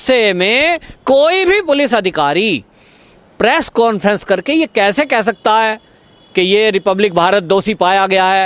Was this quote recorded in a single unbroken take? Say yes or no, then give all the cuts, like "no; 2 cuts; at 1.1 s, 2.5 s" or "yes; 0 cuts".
yes; 0 cuts